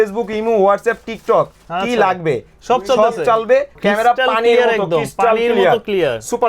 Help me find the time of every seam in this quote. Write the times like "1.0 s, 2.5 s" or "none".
3.7 s